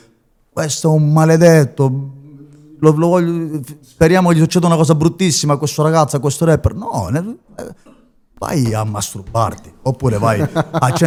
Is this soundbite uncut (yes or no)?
yes